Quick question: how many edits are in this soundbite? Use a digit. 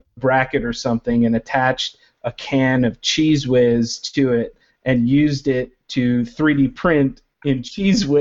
0